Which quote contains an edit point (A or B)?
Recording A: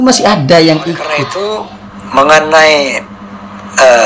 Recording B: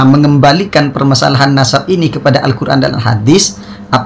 A